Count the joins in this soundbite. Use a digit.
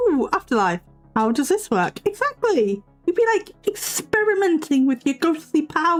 0